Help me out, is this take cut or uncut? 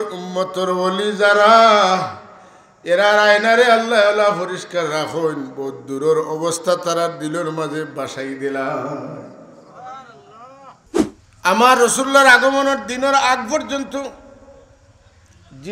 cut